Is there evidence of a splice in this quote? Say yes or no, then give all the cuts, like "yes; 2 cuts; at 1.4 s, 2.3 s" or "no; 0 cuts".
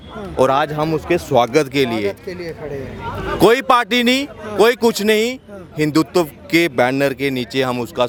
no; 0 cuts